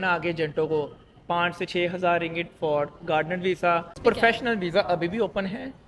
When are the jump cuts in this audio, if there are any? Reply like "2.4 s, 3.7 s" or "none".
3.9 s